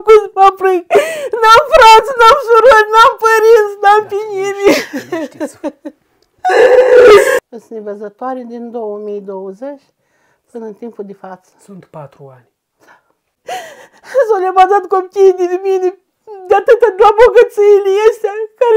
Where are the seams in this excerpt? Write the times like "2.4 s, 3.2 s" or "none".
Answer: 7.4 s, 13.3 s

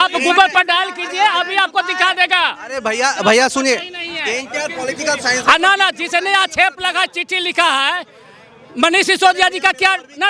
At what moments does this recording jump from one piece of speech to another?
none

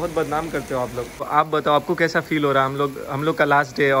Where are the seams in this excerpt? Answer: 1.3 s

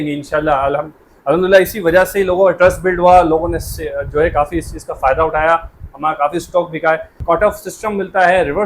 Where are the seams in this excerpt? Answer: 7.2 s

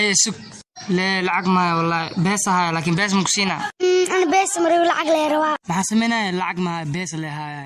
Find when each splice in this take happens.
none

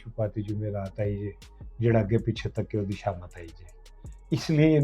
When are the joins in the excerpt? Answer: none

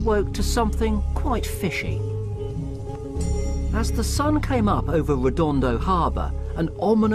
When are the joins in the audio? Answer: 3.0 s

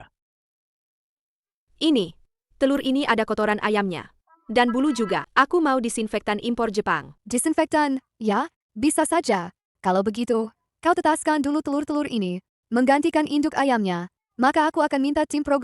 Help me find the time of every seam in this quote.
5.3 s, 7.1 s

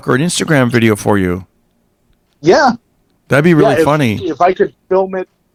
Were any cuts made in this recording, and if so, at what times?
none

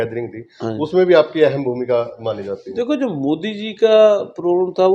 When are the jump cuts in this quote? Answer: none

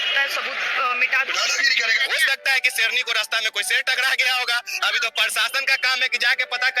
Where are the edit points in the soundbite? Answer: 1.5 s

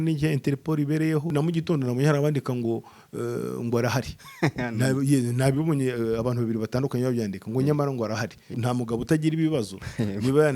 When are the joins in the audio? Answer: 1.3 s, 8.5 s

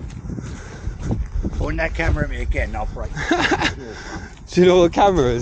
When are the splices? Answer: none

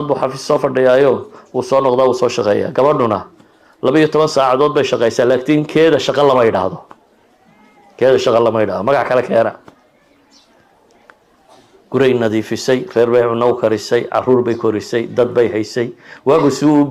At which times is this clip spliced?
none

